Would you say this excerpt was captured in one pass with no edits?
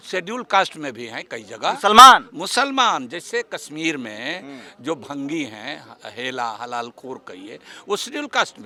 yes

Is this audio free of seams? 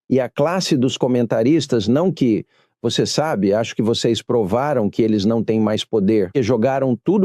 yes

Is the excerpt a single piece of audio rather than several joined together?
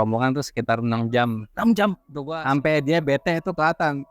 no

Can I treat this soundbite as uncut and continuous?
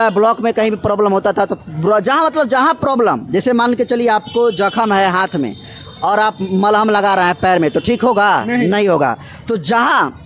yes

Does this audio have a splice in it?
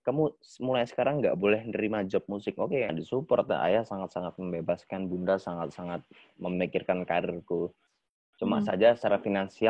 yes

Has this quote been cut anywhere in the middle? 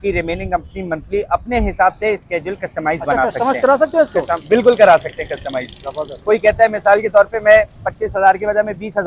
no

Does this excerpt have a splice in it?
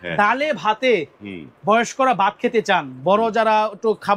no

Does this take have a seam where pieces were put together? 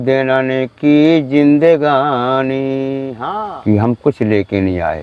yes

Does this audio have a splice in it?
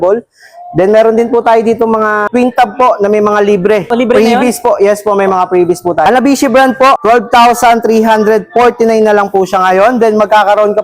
yes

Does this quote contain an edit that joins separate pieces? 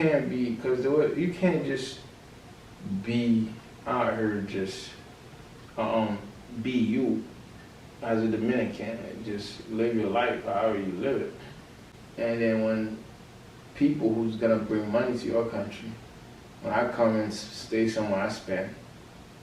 no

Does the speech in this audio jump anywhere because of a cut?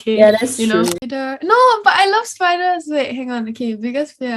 yes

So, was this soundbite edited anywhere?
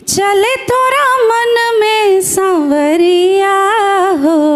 no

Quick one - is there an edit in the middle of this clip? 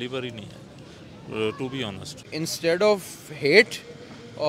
yes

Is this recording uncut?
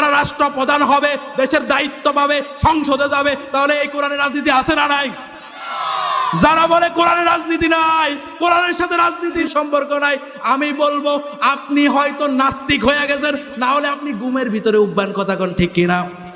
yes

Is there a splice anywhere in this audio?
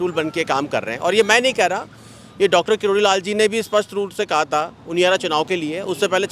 no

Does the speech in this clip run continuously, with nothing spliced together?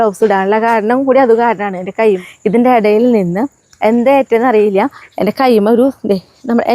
no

